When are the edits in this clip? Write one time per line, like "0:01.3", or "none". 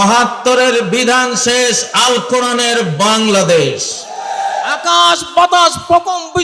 0:04.8